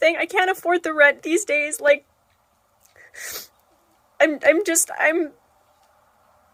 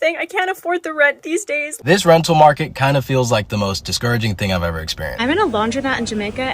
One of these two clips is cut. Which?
second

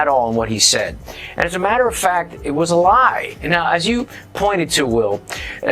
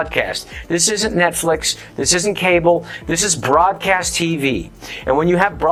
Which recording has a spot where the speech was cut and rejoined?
first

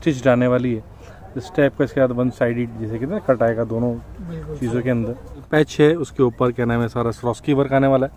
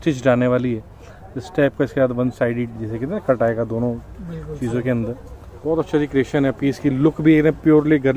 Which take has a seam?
first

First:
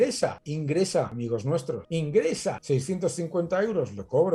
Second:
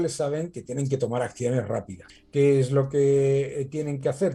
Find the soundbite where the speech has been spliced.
first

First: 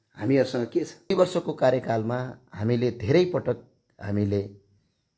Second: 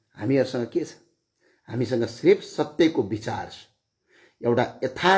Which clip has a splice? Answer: first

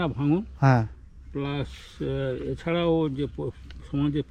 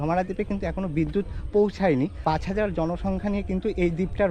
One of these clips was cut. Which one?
second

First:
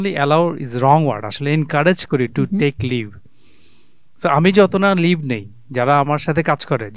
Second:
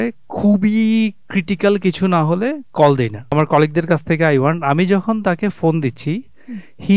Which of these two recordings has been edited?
second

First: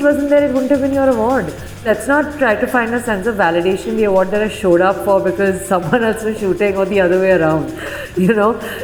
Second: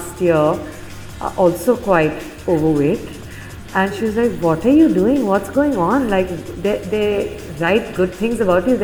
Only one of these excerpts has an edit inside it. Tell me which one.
first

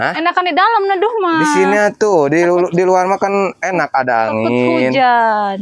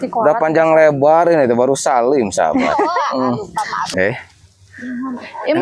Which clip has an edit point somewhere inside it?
second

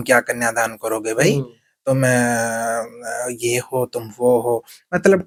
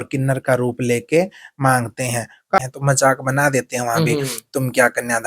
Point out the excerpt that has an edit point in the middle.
second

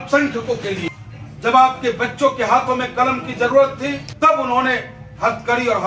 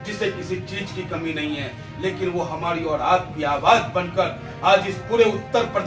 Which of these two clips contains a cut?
first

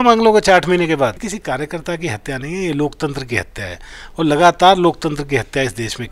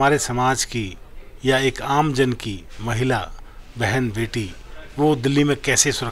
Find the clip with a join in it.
first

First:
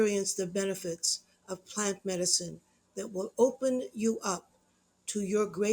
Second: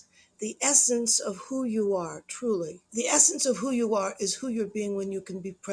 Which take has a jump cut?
second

